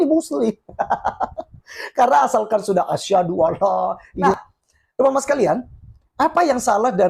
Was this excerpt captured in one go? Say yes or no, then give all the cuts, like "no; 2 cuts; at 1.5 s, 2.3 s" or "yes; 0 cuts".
no; 1 cut; at 4.1 s